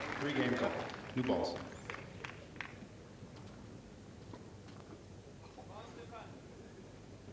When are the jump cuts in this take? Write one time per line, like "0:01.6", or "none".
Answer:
0:06.2